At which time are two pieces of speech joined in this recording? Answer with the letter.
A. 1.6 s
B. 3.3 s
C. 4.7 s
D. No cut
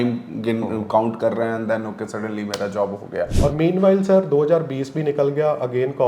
B